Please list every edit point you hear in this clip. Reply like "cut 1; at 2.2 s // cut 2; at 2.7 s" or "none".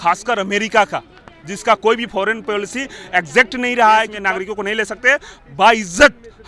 cut 1; at 4.1 s